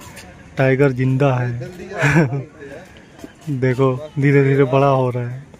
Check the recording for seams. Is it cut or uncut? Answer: uncut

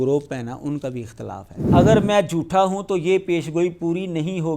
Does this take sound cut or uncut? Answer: cut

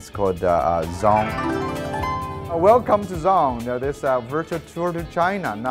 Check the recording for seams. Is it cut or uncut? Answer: uncut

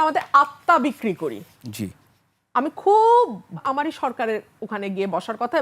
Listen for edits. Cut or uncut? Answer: cut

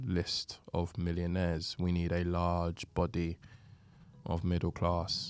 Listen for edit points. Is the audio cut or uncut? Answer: uncut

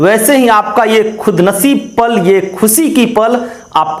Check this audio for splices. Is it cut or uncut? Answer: uncut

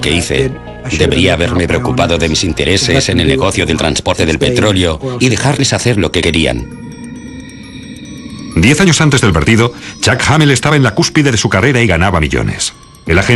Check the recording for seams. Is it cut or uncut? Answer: cut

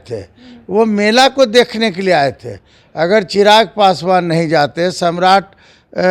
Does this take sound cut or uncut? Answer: uncut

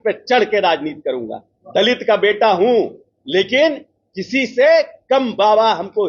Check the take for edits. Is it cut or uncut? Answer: uncut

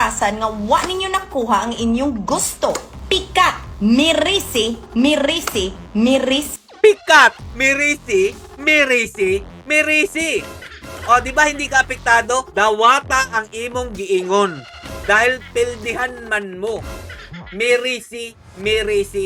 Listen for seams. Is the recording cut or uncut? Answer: uncut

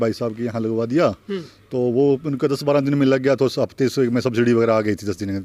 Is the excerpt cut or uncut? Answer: uncut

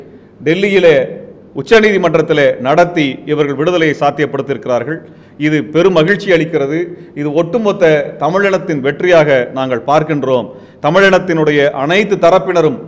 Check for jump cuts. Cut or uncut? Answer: uncut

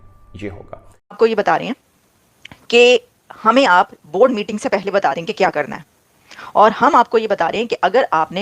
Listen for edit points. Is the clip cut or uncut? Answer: cut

